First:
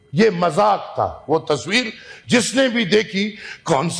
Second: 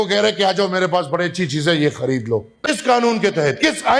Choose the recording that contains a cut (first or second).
second